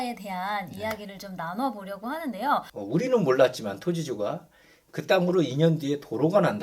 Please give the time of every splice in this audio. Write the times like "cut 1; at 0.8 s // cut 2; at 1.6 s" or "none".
cut 1; at 2.7 s